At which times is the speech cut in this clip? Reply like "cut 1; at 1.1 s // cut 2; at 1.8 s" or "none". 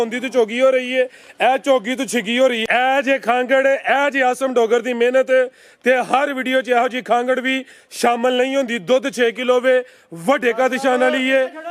cut 1; at 2.6 s